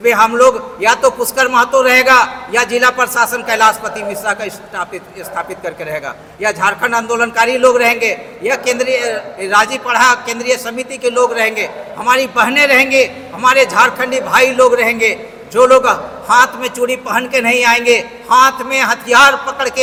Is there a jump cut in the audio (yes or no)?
no